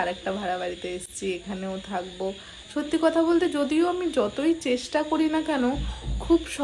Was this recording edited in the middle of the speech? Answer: no; 0 cuts

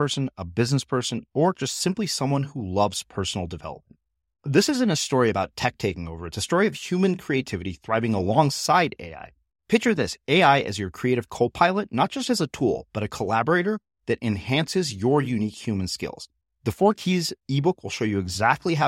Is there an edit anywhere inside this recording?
no; 0 cuts

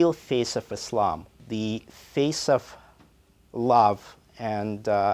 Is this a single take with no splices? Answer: no; 1 cut; at 1.3 s

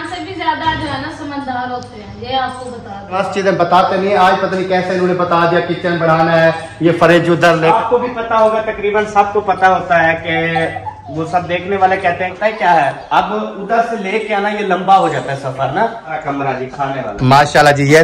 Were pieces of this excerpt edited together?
yes; 4 cuts; at 3.3 s, 7.7 s, 12.3 s, 16.2 s

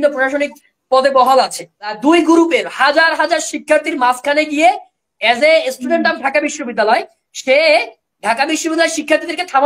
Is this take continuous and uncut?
no; 1 cut; at 2.0 s

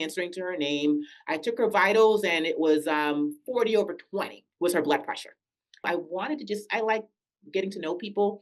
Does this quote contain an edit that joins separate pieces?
yes; 1 cut; at 5.9 s

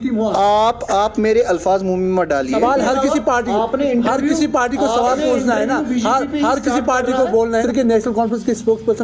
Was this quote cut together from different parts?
yes; 1 cut; at 2.5 s

